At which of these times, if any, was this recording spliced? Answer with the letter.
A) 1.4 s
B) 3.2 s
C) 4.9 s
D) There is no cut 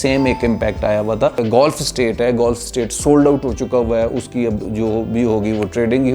A